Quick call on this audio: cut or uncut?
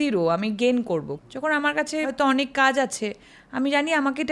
cut